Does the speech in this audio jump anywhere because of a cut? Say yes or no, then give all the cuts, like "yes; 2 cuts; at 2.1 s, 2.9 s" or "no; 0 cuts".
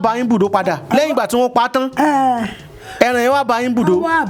no; 0 cuts